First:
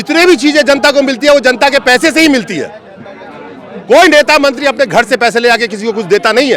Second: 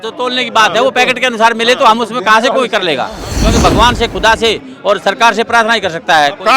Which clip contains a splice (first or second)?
second